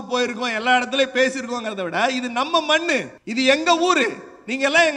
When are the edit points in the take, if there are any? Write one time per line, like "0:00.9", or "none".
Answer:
0:03.2